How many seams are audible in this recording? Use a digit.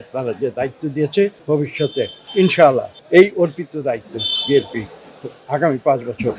2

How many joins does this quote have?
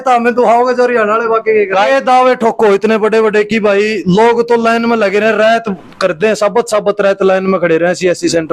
1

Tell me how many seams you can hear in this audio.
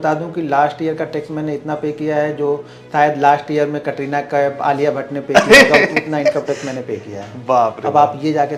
0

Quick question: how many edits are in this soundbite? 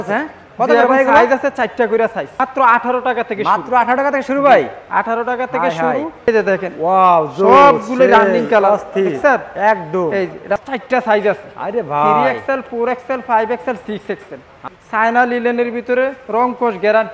4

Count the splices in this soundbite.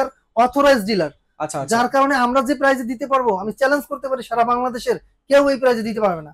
0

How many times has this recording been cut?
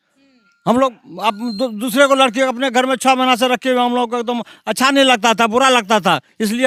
0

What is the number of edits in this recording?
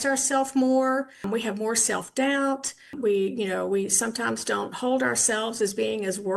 2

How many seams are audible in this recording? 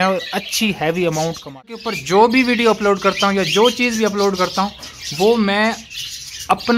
1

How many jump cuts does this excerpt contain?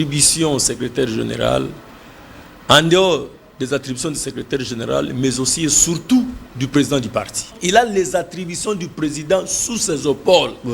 1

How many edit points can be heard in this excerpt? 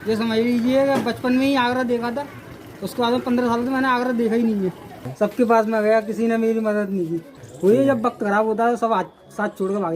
2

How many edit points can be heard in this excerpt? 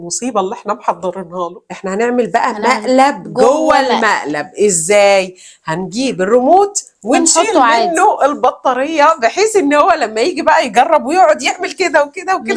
1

